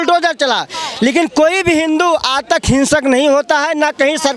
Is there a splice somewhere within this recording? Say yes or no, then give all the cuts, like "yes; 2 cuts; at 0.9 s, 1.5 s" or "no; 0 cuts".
no; 0 cuts